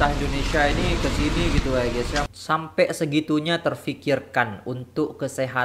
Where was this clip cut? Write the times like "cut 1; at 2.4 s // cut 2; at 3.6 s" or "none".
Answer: cut 1; at 2.2 s